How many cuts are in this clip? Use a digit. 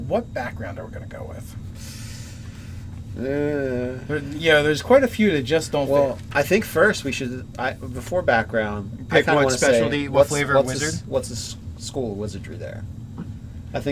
0